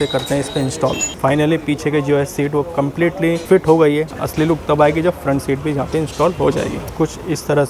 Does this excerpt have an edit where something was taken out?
yes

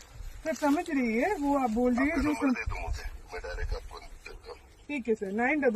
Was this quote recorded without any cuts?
yes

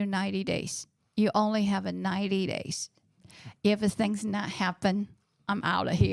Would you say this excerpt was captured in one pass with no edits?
yes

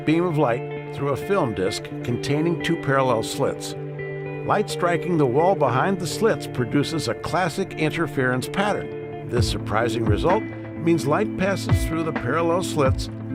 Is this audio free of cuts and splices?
yes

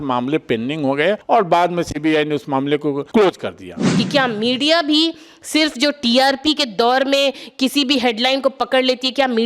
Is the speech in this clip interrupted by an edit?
yes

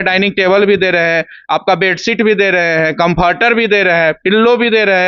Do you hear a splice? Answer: no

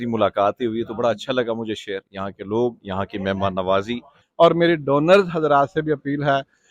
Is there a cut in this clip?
yes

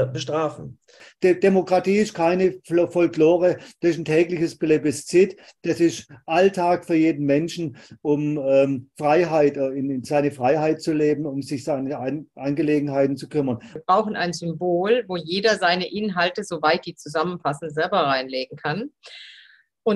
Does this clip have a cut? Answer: yes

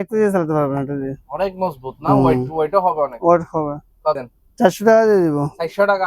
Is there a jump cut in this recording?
yes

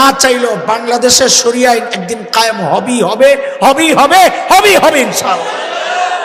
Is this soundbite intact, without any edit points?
yes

